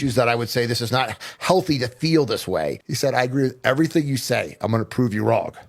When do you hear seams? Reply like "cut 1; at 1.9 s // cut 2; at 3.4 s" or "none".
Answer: cut 1; at 2.9 s